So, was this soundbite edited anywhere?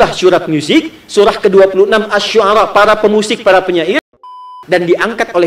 yes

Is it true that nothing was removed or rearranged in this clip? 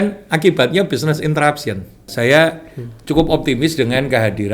no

